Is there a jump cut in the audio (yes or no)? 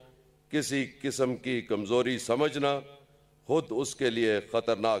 no